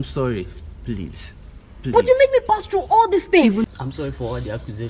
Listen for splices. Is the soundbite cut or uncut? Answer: cut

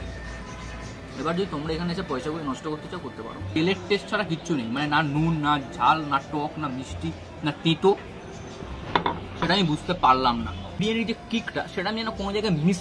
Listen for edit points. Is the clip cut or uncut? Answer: cut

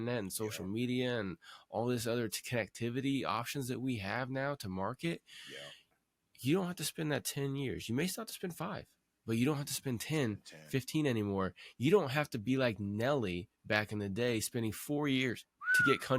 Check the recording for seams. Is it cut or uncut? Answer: uncut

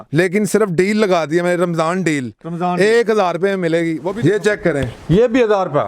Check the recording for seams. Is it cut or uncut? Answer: cut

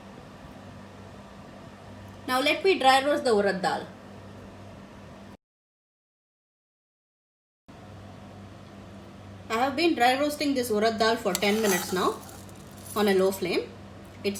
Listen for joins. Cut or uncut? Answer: uncut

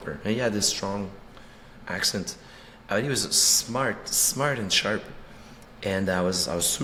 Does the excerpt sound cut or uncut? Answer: uncut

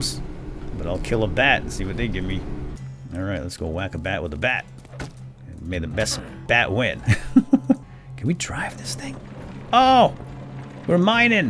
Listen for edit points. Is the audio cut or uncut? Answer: cut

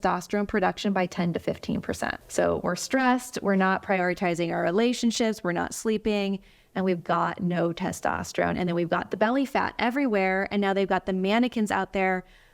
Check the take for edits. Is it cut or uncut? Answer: cut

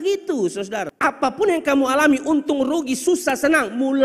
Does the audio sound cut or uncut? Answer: cut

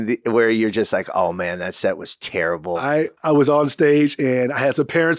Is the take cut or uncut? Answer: cut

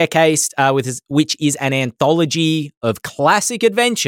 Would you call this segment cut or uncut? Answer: uncut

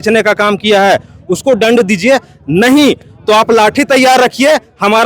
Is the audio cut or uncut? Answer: uncut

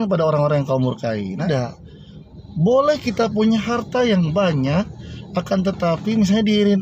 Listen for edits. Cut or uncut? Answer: cut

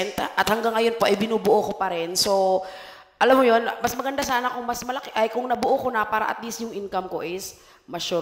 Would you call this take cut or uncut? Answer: uncut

